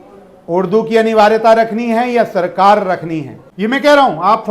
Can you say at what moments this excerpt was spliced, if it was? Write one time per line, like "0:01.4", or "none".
0:03.5